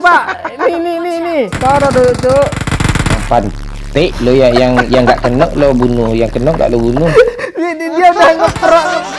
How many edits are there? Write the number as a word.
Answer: two